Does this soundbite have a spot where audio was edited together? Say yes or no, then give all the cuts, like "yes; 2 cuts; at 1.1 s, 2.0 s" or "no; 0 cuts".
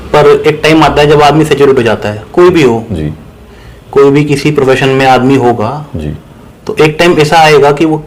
no; 0 cuts